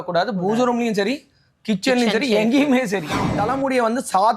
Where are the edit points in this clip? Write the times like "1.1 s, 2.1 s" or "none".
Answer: 3.3 s